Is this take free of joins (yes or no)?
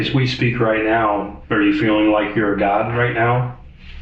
no